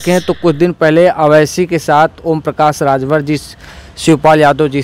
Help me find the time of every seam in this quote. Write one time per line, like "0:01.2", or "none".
none

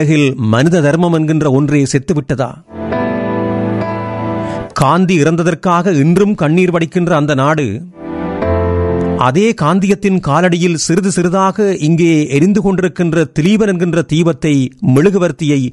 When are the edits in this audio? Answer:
none

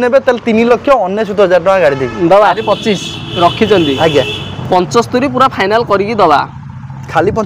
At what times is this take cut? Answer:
0:02.6

